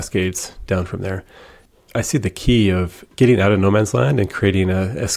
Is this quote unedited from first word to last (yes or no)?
no